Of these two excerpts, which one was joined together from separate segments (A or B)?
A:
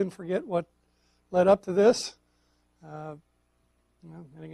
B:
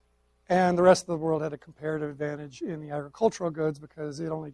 B